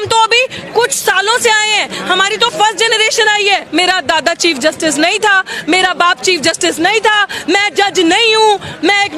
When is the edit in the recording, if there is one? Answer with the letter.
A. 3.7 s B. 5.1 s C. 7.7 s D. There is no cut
A